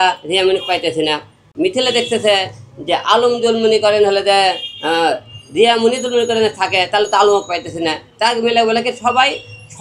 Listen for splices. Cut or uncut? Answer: cut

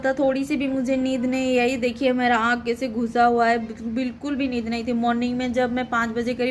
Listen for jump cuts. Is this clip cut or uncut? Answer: uncut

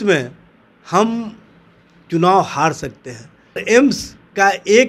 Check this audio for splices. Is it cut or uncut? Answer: cut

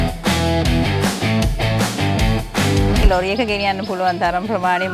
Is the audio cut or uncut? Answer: cut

